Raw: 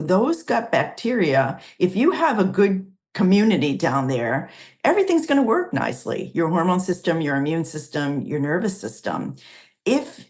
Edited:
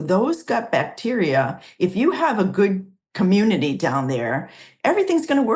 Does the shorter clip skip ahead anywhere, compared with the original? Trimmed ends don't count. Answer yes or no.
no